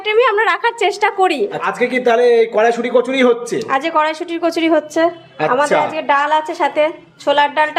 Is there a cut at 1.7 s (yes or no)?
no